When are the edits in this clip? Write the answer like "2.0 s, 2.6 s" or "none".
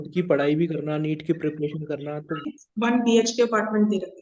2.4 s